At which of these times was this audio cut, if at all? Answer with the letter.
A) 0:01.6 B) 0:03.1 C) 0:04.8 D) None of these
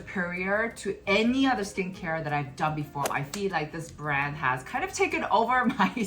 B